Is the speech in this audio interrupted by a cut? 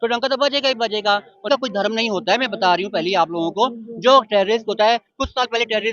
yes; 1 cut; at 1.3 s

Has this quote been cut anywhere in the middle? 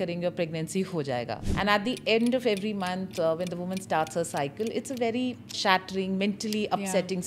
yes; 2 cuts; at 1.5 s, 5.5 s

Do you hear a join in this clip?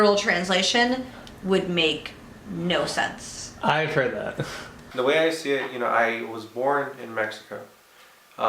yes; 1 cut; at 4.7 s

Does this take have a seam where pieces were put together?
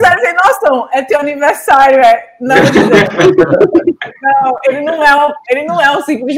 no; 0 cuts

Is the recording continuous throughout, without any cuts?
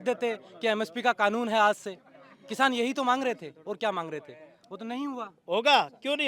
yes; 0 cuts

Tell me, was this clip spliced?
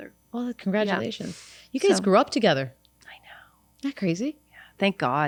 no; 0 cuts

